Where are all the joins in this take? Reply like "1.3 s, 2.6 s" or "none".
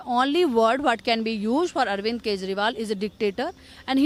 none